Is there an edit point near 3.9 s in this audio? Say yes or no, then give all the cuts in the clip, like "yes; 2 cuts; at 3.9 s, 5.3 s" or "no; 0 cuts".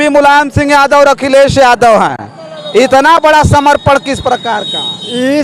no; 0 cuts